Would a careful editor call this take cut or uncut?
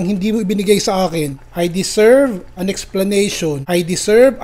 cut